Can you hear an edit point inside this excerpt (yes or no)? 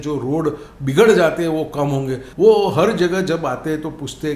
yes